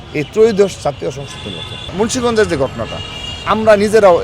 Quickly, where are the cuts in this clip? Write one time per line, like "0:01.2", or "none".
0:01.9

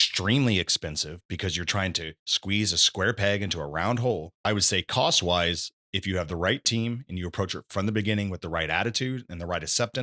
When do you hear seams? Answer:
0:04.3

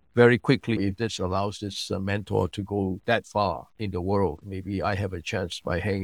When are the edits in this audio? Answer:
0:00.8
0:03.7
0:04.5

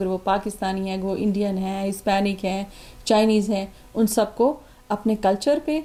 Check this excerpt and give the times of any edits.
none

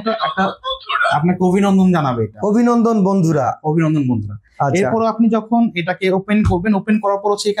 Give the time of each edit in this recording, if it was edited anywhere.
none

